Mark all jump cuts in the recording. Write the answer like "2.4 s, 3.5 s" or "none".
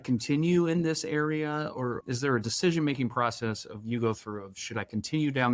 none